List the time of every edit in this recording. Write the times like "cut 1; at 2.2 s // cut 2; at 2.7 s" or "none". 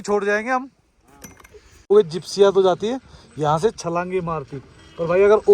cut 1; at 1.8 s